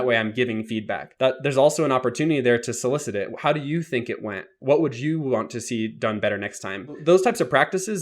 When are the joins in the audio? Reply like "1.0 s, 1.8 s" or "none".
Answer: 1.0 s, 7.0 s